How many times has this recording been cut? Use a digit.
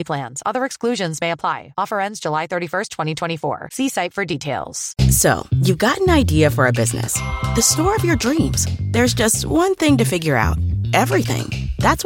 1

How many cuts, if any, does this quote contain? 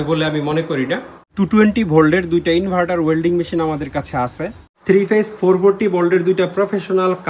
2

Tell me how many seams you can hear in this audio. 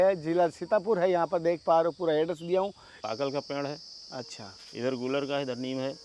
1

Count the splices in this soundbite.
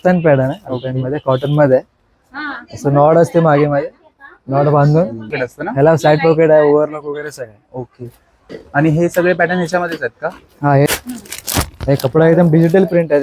2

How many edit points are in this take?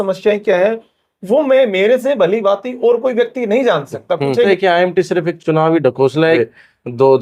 2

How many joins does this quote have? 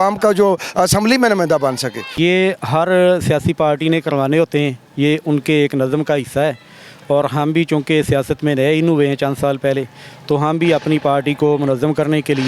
1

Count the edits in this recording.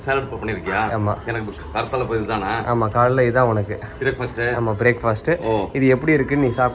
0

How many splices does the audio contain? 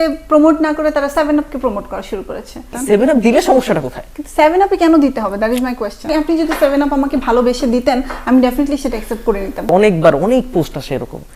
3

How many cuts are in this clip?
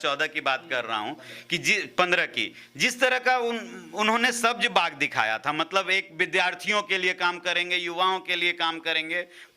0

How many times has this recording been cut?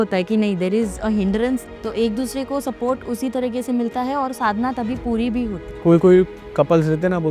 3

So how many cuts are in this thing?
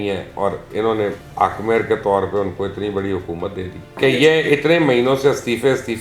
2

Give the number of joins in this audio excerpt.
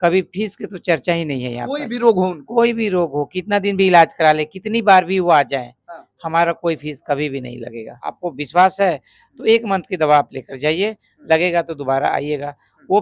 1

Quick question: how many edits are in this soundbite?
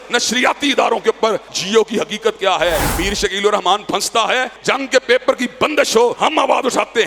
4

